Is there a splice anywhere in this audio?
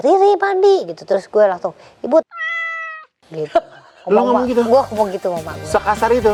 no; 0 cuts

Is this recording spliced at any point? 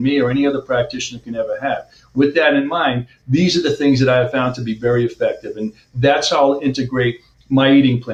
no; 0 cuts

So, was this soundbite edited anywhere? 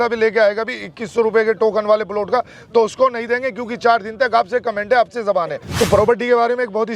yes; 1 cut; at 5.6 s

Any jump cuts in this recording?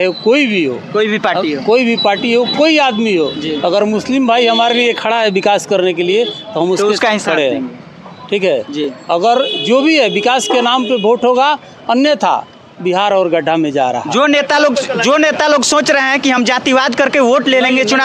no; 0 cuts

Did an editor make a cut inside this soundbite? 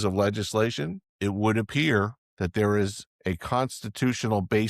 yes; 3 cuts; at 1.0 s, 2.2 s, 3.1 s

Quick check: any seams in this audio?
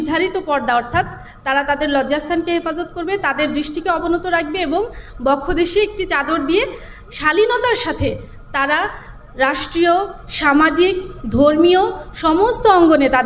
no; 0 cuts

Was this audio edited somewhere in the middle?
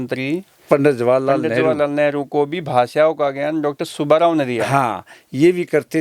no; 0 cuts

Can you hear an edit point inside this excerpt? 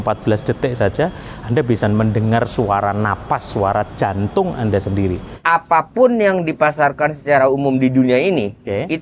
yes; 1 cut; at 5.3 s

